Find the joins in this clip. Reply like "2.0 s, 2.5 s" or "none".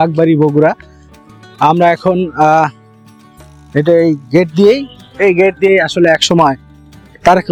none